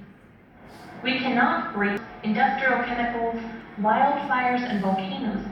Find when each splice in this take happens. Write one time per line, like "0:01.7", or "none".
0:02.1

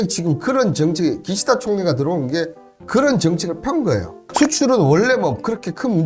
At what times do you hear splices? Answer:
0:04.2

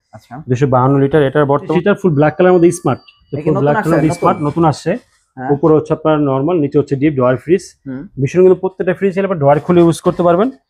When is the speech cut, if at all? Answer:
0:01.7

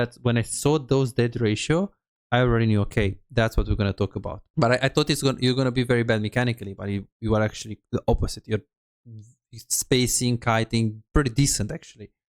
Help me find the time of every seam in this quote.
0:04.4

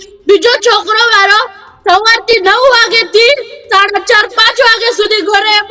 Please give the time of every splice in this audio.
none

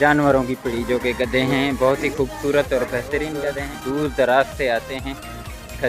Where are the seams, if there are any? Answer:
0:03.7

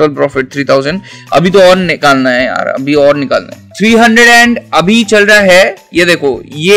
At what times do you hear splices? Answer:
none

